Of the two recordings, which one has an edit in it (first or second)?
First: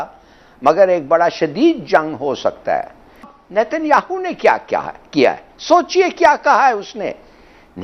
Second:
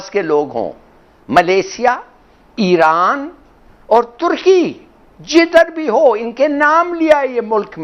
first